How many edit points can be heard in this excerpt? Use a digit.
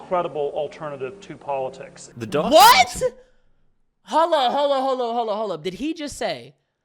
0